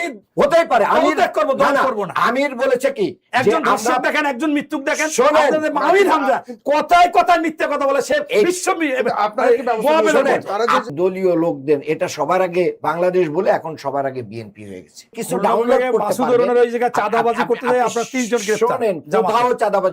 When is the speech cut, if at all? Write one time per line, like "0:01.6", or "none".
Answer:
0:10.9
0:15.2